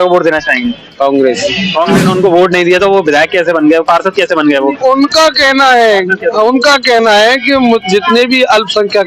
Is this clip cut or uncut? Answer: cut